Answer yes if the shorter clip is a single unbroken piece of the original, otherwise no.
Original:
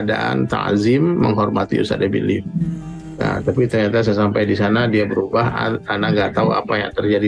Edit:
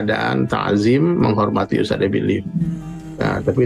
yes